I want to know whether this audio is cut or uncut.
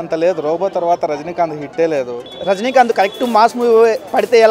cut